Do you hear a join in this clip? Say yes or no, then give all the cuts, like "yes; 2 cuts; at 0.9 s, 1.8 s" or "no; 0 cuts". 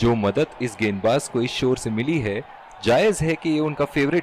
no; 0 cuts